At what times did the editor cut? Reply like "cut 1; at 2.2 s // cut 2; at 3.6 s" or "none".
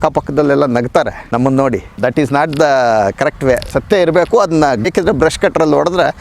cut 1; at 1.2 s // cut 2; at 2.0 s // cut 3; at 3.7 s // cut 4; at 4.9 s